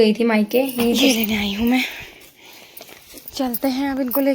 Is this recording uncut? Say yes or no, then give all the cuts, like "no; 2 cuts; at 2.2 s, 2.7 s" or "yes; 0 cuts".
no; 1 cut; at 1.0 s